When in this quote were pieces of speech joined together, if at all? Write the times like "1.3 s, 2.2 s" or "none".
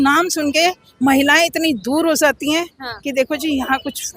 none